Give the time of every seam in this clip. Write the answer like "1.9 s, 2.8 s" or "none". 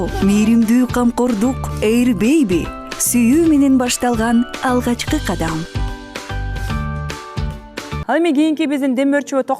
7.9 s